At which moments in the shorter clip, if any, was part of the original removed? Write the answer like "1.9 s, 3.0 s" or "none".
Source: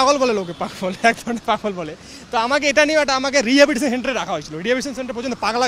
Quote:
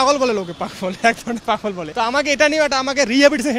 1.8 s